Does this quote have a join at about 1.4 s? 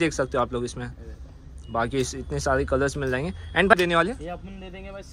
no; 1 cut; at 3.7 s

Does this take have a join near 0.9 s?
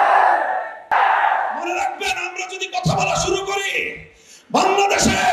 yes; 1 cut; at 0.9 s

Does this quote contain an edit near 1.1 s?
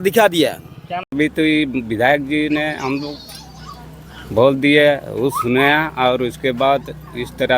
yes; 1 cut; at 1.1 s

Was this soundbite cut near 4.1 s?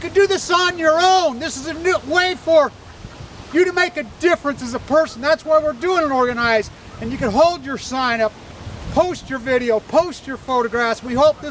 no; 1 cut; at 0.9 s

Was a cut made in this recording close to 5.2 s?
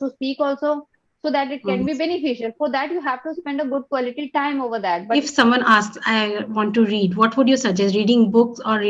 yes; 1 cut; at 5.2 s

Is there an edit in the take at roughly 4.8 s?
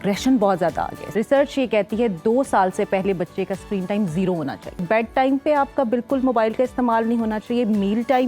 yes; 2 cuts; at 1.0 s, 4.8 s

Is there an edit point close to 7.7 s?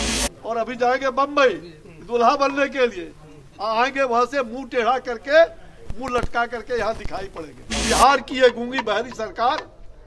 yes; 1 cut; at 7.7 s

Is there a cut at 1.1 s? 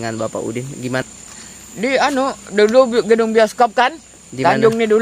yes; 1 cut; at 1.1 s

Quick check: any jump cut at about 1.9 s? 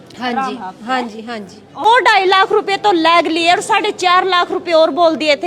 yes; 1 cut; at 1.9 s

